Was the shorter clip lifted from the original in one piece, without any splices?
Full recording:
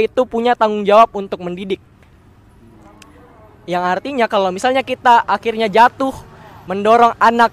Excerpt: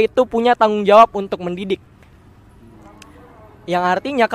yes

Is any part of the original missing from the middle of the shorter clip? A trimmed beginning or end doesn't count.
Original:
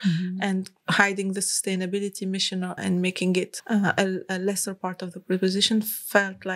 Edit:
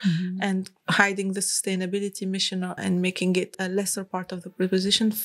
yes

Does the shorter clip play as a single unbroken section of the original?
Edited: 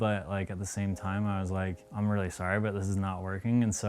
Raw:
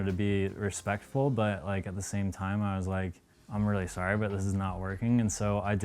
no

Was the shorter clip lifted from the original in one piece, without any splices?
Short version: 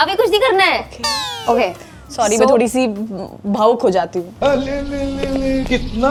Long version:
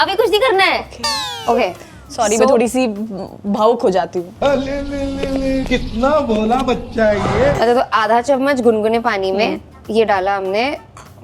yes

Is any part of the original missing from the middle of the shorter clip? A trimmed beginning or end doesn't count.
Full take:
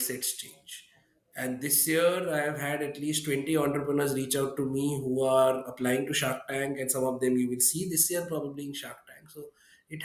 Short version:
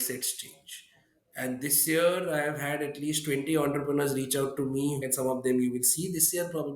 yes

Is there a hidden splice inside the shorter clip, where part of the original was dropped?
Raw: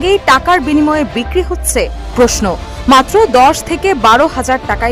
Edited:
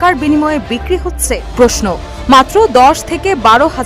yes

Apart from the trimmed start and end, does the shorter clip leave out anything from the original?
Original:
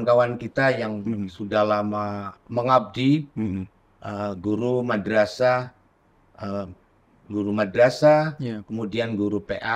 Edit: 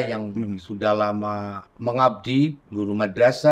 yes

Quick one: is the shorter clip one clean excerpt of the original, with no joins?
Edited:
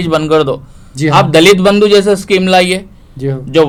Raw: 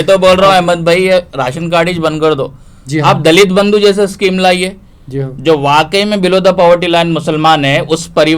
yes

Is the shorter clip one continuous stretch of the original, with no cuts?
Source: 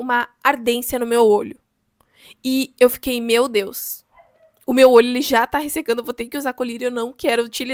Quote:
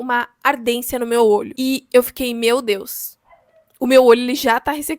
no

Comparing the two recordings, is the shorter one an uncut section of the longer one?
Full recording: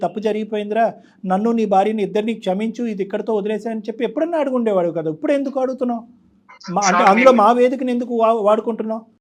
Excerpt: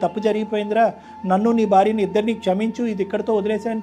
yes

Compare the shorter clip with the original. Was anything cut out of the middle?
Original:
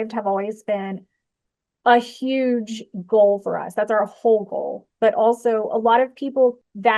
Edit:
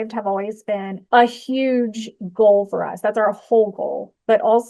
yes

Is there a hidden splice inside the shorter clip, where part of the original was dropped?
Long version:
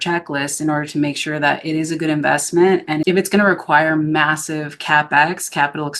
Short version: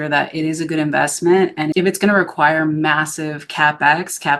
no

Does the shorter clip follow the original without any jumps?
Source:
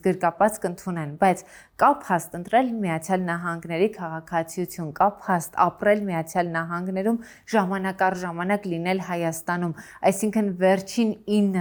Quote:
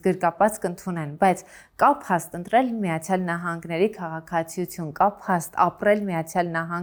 yes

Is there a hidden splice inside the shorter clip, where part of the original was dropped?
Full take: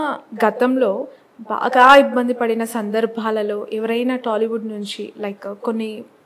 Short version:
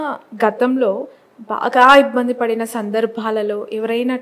no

